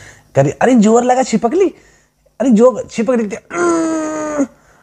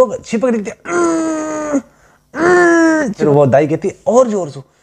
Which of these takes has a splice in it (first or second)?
second